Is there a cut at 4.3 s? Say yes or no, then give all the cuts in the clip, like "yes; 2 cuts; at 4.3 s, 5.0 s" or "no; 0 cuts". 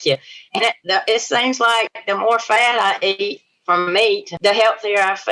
yes; 1 cut; at 4.3 s